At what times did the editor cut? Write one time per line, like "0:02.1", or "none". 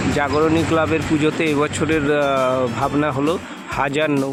none